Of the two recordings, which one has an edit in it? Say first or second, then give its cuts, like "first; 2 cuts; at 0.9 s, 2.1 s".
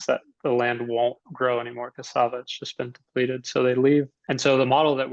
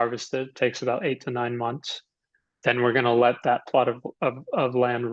first; 1 cut; at 4.2 s